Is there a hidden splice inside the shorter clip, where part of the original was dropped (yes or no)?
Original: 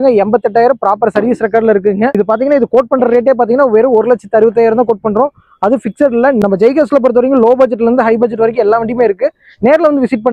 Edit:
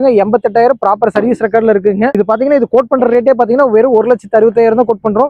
no